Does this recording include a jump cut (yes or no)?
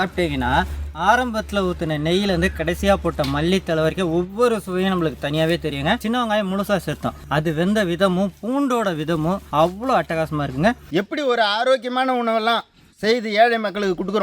yes